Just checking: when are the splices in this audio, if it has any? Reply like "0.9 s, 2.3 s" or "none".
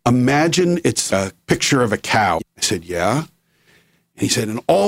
1.1 s, 2.5 s